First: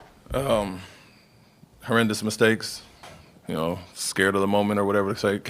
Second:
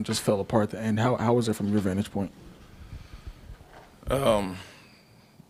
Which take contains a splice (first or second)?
first